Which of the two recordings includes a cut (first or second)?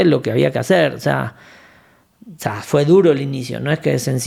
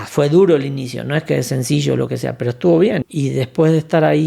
second